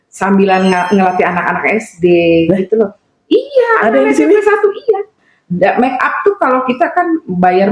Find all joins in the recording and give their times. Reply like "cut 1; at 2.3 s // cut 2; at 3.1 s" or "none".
none